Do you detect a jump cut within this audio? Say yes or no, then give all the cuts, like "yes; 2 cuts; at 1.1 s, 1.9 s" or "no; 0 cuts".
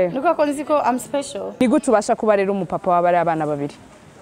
yes; 1 cut; at 1.6 s